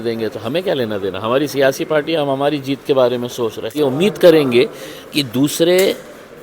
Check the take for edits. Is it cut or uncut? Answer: cut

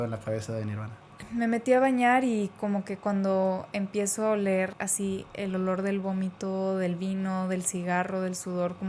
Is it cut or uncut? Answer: cut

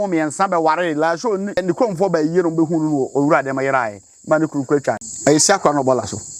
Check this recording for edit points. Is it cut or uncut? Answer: cut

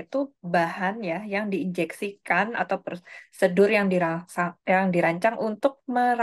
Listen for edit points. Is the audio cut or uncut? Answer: uncut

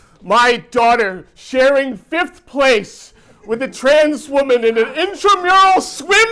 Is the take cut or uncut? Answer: uncut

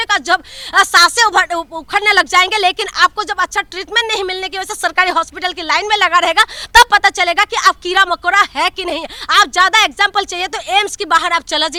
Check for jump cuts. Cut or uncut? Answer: uncut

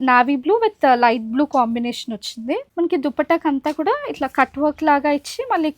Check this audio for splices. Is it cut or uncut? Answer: cut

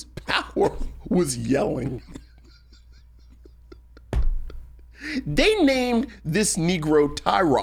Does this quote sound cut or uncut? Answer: uncut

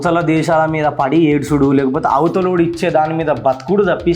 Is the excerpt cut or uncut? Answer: uncut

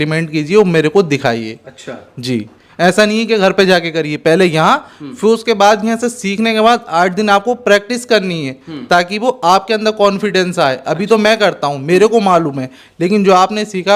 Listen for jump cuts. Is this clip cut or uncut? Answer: uncut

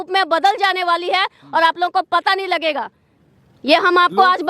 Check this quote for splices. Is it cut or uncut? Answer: uncut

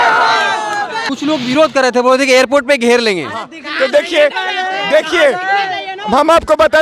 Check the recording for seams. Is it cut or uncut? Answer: cut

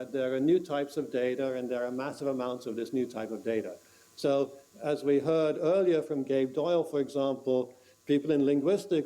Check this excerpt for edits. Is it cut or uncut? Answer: uncut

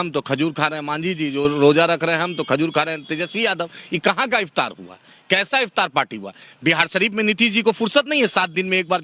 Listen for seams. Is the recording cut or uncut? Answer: uncut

